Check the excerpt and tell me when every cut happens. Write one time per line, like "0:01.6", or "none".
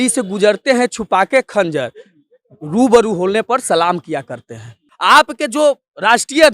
0:04.8

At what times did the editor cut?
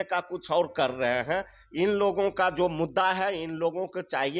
none

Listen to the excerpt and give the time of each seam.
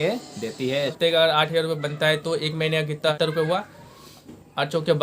0:01.0
0:03.1

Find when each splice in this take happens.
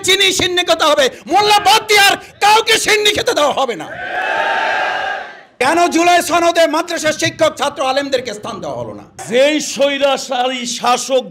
0:05.5
0:09.2

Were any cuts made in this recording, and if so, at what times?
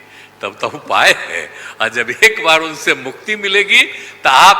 none

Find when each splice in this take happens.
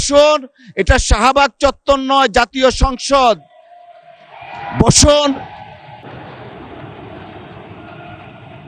none

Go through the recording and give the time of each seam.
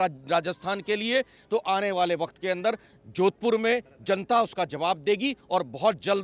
none

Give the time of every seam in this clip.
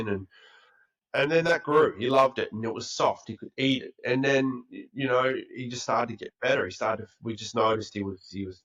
none

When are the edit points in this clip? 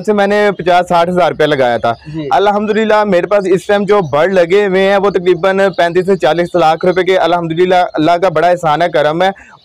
none

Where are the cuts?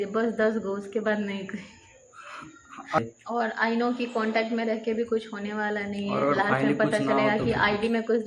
0:03.0

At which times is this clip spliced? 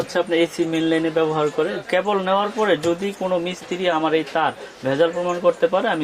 0:01.8
0:04.0

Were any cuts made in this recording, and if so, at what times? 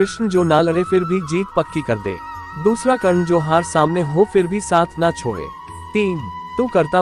0:06.1

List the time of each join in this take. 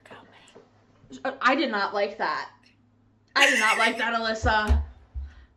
none

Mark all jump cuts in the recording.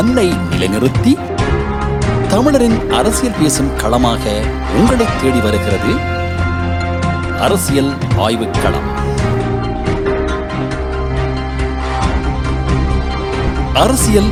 none

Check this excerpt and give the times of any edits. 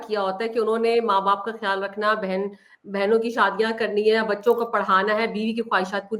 none

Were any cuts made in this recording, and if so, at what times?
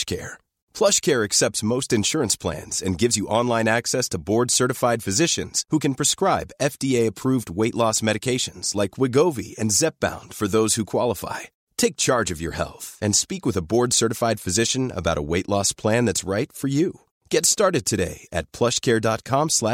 none

